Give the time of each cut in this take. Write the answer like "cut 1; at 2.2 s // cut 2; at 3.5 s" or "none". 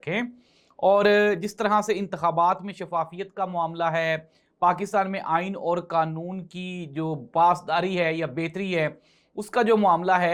none

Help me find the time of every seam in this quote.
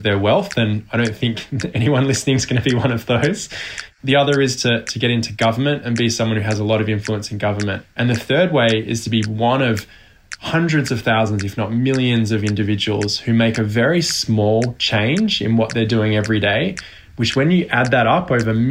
cut 1; at 3.9 s // cut 2; at 7.8 s

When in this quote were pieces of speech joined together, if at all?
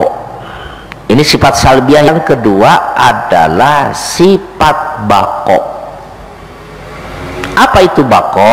cut 1; at 2.1 s

